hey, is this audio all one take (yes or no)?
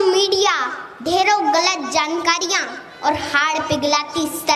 yes